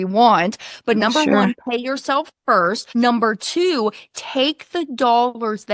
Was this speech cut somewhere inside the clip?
yes; 1 cut; at 2.8 s

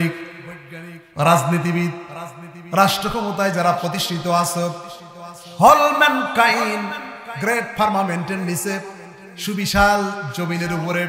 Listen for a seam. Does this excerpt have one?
no; 0 cuts

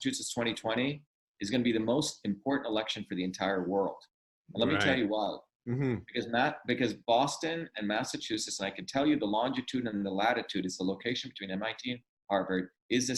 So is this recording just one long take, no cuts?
yes; 0 cuts

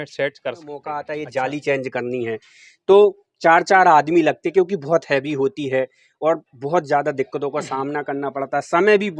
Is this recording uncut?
no; 1 cut; at 0.9 s

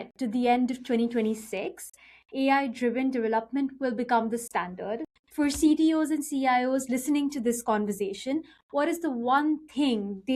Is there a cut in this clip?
yes; 1 cut; at 5.2 s

